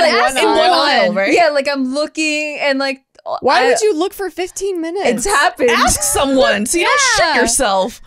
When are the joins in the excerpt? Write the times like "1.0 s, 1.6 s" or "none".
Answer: none